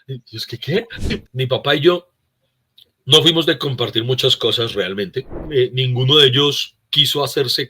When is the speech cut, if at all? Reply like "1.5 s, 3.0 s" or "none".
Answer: 1.3 s, 5.3 s